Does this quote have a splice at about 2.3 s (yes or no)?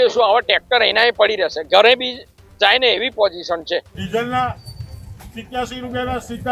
no